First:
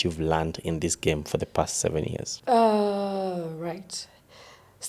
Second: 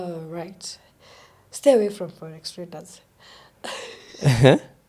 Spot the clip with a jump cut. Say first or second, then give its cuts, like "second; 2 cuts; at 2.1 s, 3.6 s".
first; 1 cut; at 2.3 s